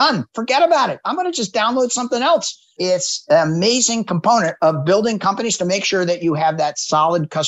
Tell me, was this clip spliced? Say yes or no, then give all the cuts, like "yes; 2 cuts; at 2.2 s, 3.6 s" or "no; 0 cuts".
yes; 1 cut; at 2.7 s